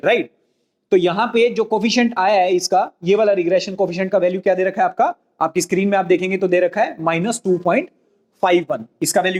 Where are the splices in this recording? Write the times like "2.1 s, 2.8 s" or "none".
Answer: none